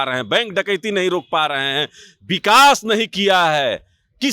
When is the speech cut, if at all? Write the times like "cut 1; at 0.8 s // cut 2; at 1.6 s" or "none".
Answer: none